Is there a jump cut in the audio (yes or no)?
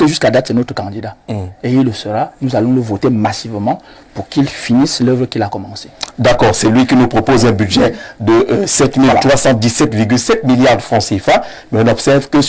no